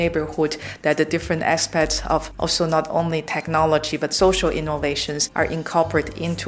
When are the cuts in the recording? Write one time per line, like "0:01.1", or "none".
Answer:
0:02.3
0:05.2